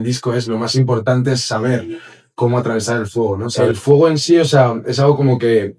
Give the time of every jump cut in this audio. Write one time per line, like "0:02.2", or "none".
0:03.5